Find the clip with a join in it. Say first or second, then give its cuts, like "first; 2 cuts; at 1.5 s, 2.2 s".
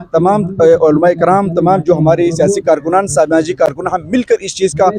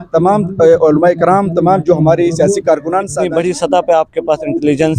second; 1 cut; at 3.1 s